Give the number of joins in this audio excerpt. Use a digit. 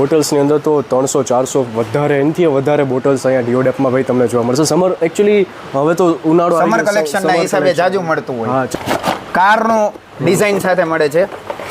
1